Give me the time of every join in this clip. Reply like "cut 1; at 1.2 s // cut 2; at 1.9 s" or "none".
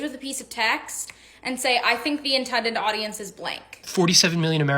cut 1; at 3.9 s